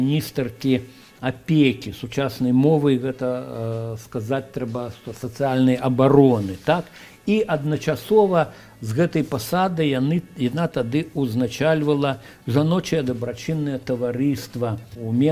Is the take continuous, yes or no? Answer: yes